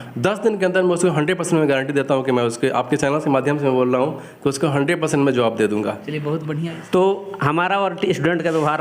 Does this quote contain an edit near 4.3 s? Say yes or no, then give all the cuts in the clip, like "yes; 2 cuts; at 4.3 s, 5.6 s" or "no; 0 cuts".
no; 1 cut; at 6.5 s